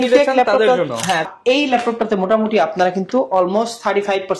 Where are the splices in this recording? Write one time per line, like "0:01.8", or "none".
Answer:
0:01.3